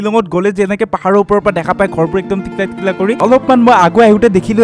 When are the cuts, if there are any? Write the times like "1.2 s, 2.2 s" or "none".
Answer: 3.2 s